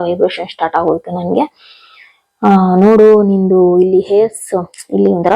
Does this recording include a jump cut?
no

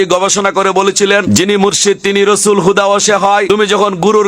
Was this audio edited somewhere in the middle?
yes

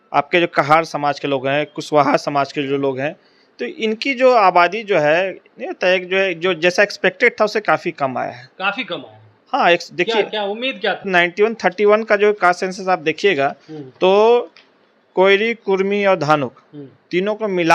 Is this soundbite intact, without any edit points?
no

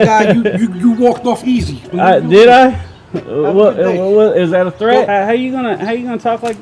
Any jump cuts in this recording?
yes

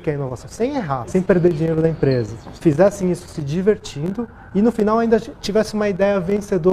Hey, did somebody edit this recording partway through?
yes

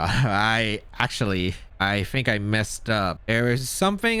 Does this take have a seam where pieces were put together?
yes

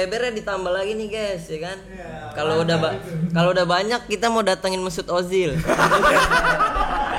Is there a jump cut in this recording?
no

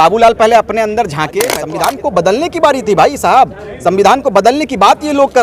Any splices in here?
yes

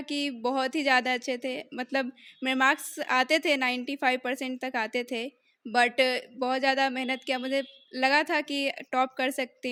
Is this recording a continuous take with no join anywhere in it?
yes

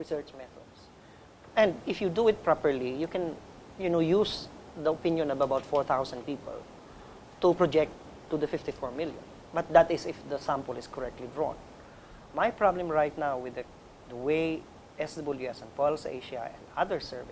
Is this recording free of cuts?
no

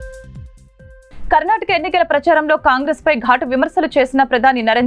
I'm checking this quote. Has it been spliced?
yes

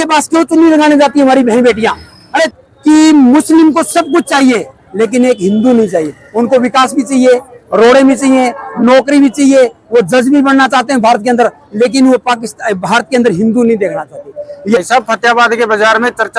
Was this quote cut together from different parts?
yes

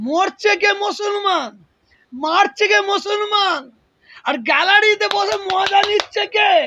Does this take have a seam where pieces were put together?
no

